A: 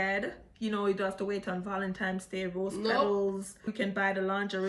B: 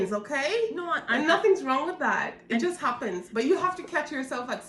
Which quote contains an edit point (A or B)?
A